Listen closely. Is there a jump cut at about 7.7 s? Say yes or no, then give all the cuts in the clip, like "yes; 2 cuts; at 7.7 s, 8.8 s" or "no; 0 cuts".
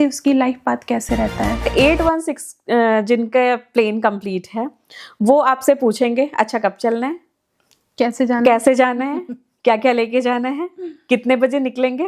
no; 1 cut; at 1.7 s